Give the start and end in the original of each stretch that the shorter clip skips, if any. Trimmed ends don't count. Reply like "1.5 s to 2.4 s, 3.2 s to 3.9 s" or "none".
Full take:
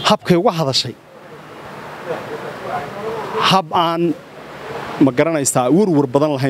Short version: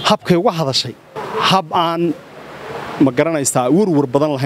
1.2 s to 3.2 s